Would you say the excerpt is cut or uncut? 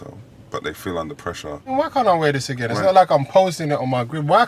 cut